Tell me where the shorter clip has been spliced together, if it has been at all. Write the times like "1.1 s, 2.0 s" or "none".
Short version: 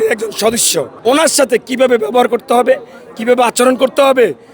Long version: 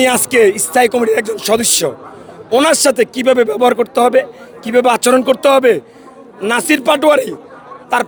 0.9 s